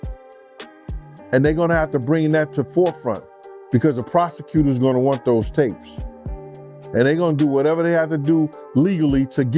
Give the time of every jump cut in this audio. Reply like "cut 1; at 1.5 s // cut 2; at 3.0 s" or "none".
cut 1; at 1.3 s